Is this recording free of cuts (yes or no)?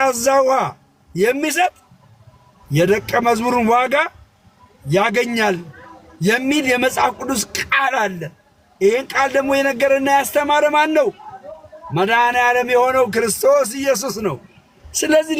yes